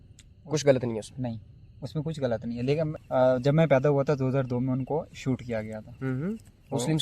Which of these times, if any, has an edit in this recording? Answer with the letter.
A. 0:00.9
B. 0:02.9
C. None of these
B